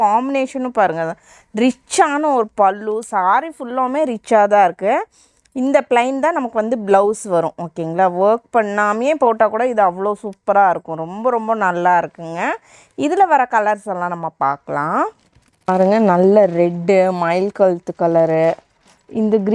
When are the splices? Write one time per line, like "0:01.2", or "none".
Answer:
none